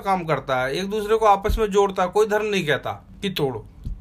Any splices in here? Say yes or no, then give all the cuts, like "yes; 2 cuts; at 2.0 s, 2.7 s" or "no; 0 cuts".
yes; 1 cut; at 3.1 s